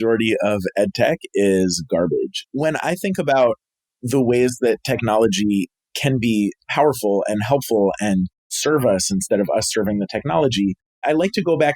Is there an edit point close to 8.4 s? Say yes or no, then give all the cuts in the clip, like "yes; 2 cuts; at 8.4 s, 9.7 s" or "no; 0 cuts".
no; 1 cut; at 2.5 s